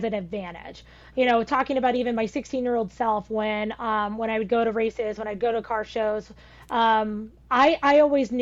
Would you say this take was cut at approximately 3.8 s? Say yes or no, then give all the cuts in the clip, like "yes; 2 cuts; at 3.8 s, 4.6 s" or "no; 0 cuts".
no; 0 cuts